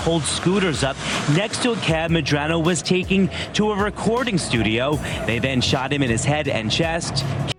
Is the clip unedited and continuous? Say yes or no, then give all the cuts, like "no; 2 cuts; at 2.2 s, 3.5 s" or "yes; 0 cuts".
yes; 0 cuts